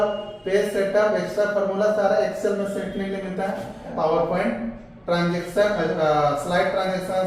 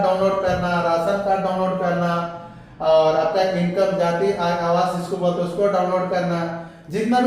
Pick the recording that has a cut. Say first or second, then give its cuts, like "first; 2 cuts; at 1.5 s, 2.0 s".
first; 1 cut; at 3.9 s